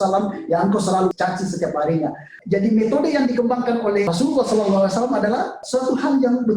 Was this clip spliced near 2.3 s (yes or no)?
yes